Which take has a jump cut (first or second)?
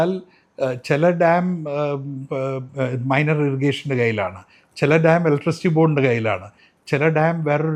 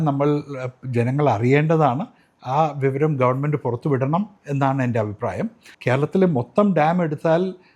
second